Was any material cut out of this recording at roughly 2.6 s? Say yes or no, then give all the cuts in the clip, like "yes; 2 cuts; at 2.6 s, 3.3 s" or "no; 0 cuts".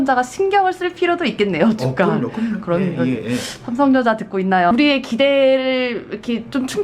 no; 1 cut; at 4.7 s